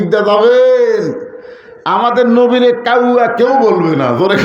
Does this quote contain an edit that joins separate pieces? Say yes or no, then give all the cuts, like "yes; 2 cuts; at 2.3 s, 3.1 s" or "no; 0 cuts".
no; 0 cuts